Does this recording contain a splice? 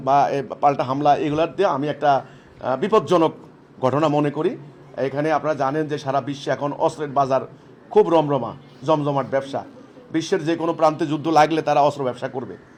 no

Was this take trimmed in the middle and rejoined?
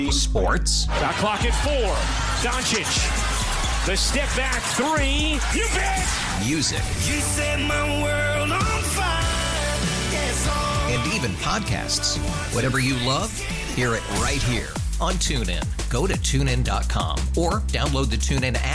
no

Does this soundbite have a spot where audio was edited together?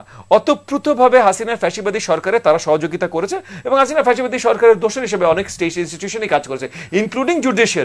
no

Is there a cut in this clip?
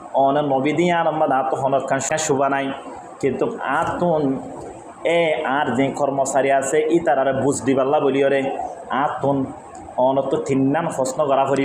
yes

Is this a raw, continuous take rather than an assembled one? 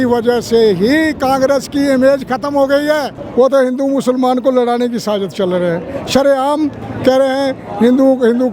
no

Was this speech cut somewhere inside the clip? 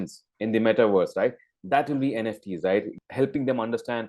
yes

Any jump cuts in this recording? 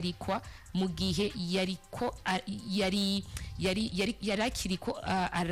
no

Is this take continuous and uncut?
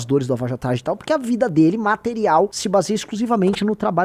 no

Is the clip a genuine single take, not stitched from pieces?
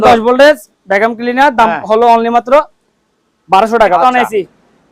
no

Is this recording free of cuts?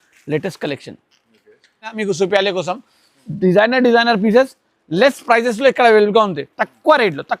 no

